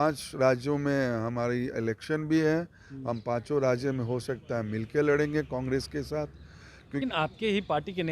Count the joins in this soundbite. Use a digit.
1